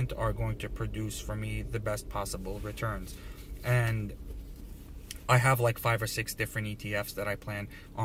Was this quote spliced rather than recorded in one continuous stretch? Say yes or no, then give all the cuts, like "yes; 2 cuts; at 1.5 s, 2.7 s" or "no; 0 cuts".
no; 0 cuts